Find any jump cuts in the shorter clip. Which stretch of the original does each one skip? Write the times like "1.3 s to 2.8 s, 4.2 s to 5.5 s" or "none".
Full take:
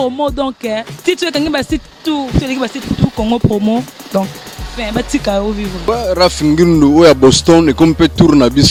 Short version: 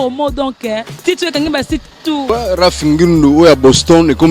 2.2 s to 5.8 s